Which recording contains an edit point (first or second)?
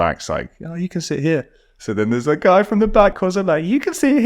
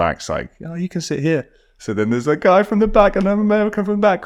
first